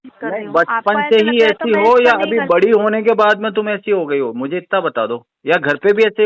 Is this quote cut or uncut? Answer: uncut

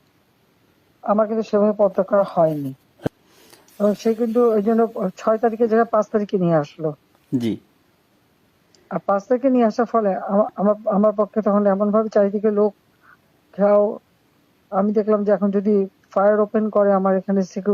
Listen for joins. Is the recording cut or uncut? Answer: cut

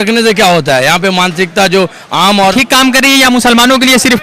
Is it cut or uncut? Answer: cut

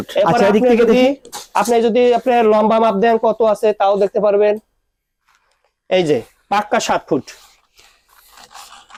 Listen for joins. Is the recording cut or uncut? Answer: uncut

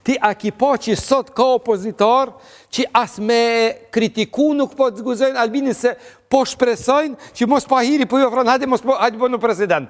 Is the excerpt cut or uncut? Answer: uncut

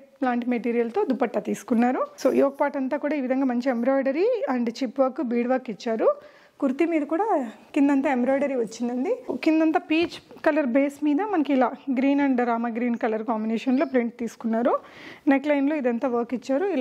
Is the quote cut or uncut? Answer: cut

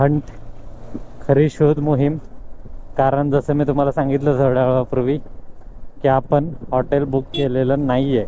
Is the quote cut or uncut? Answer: uncut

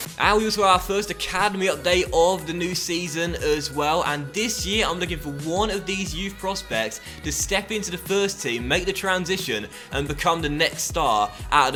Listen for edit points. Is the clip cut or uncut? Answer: uncut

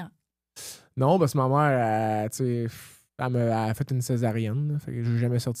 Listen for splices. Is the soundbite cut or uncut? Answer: uncut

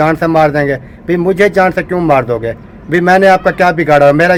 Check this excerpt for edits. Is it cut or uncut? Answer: uncut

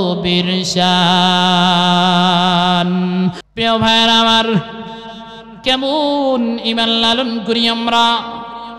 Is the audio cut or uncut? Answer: cut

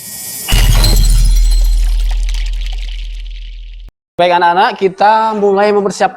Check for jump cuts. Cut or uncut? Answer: cut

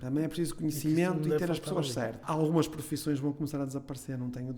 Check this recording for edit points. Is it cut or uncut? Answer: cut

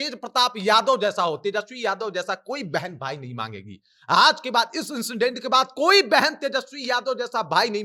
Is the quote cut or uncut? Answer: uncut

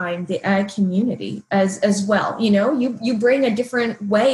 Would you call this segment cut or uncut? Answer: uncut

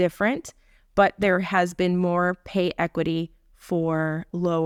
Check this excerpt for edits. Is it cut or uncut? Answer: uncut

